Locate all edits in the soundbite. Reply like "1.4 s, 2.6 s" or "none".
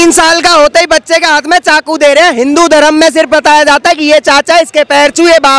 none